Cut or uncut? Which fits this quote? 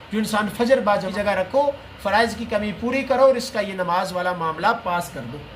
cut